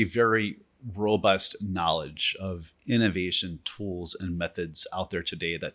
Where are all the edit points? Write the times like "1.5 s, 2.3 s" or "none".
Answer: none